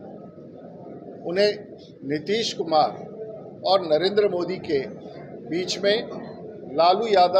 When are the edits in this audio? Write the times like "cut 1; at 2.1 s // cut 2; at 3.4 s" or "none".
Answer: none